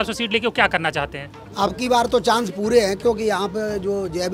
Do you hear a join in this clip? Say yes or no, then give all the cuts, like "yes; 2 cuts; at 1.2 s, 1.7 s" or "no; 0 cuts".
yes; 1 cut; at 1.3 s